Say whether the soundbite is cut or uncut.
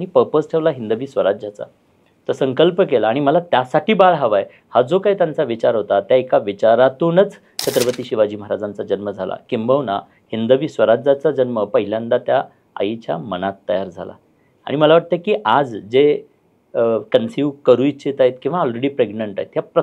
uncut